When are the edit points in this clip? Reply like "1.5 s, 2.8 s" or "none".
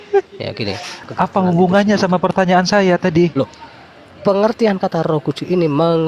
1.1 s